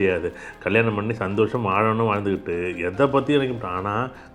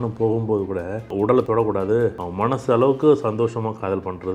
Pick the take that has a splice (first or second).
second